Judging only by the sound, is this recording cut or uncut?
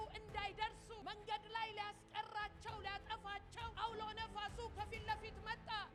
uncut